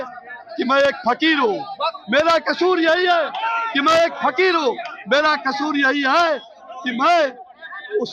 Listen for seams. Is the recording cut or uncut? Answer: uncut